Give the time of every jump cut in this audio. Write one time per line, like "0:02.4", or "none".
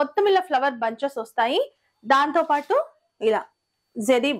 none